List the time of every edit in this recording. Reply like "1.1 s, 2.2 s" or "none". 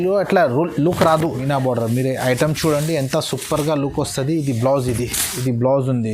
1.4 s, 5.2 s